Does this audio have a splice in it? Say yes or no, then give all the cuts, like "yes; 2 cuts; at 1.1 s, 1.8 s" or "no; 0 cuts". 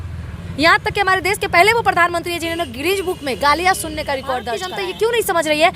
yes; 1 cut; at 4.7 s